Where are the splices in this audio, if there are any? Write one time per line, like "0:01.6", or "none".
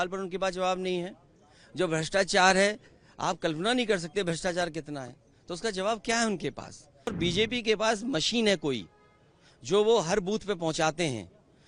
0:07.1